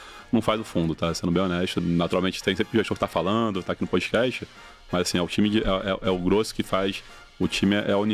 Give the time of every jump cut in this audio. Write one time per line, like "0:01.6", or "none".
0:01.8